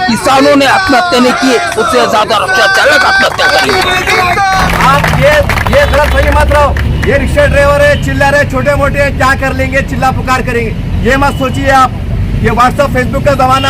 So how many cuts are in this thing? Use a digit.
1